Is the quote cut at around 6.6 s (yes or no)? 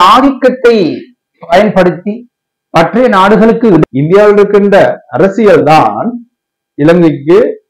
no